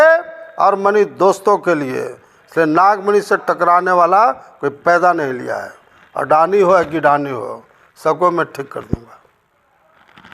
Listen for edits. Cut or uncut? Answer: uncut